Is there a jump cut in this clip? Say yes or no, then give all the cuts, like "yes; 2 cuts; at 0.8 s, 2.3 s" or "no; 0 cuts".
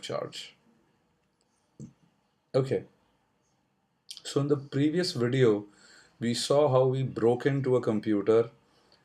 yes; 1 cut; at 3.7 s